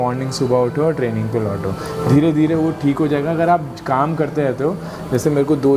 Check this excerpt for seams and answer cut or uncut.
uncut